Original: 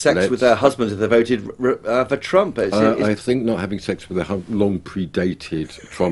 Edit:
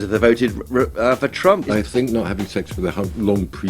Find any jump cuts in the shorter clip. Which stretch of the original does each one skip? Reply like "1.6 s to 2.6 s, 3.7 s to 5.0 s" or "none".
2.5 s to 3.0 s